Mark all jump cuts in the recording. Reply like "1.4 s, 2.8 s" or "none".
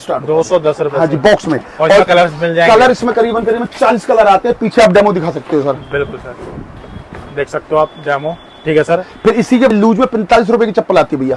9.7 s